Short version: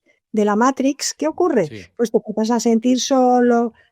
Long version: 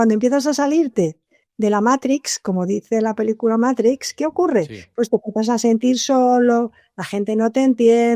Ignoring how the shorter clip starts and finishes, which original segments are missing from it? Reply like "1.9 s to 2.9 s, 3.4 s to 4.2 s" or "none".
2.3 s to 4.1 s